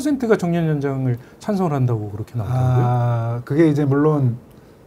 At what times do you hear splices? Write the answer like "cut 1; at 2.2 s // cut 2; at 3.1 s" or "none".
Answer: none